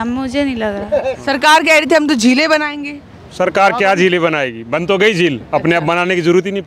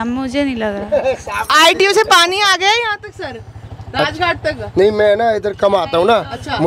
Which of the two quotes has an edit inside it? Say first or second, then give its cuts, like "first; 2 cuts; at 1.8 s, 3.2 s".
first; 1 cut; at 1.2 s